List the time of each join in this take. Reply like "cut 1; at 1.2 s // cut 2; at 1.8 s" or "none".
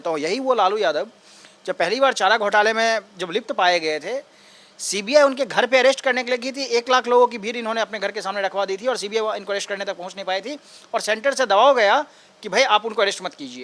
none